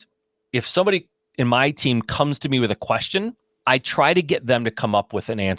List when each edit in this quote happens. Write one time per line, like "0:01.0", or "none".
0:03.5